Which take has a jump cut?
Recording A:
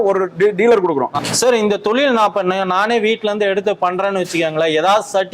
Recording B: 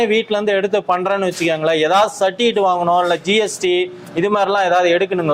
A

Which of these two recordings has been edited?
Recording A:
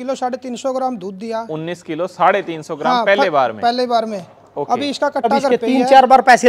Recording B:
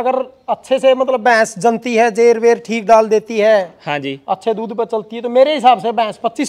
A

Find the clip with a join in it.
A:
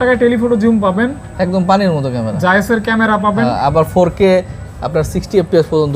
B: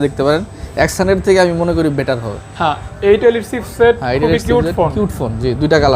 B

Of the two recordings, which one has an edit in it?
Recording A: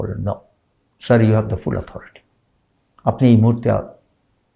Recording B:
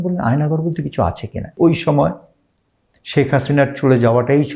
B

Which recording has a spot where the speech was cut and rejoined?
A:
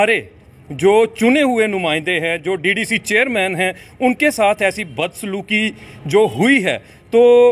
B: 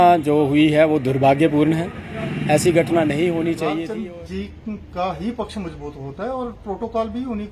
B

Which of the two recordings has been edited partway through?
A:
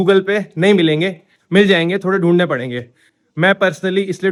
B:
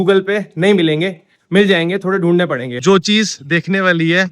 B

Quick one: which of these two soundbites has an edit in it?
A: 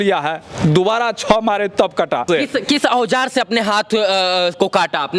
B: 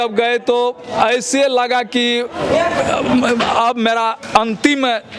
A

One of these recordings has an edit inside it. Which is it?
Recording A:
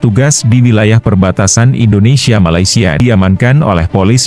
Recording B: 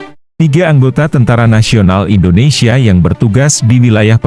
A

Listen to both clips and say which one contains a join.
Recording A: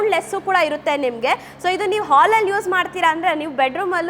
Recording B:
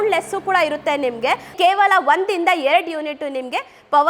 B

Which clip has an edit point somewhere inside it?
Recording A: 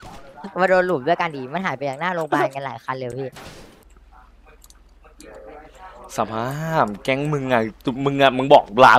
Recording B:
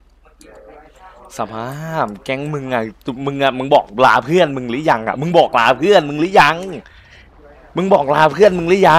A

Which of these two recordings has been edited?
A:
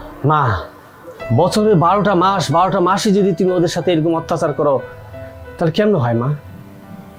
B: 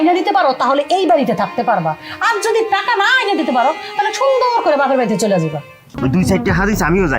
B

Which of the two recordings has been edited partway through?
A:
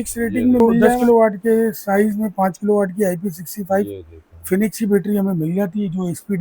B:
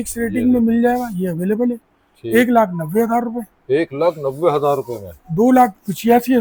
A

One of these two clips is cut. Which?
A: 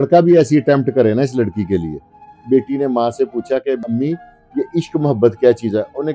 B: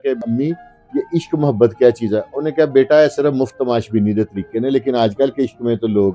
A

